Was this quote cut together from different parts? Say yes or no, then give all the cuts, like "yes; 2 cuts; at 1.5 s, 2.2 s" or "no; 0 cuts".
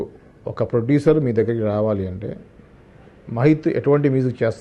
no; 0 cuts